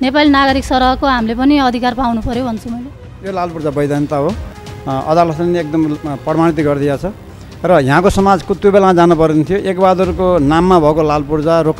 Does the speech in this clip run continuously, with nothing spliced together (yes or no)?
no